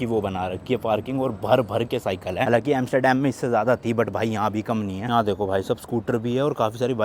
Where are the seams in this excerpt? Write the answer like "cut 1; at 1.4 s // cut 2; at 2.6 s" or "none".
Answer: none